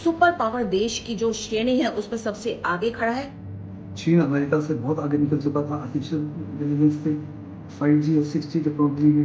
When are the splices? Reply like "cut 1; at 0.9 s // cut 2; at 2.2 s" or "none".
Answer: cut 1; at 3.3 s